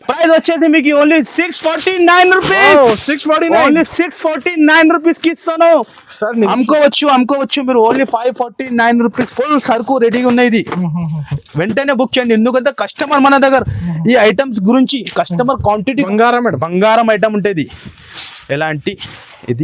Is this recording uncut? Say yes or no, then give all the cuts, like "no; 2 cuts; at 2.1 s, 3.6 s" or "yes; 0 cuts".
no; 2 cuts; at 6.5 s, 16.1 s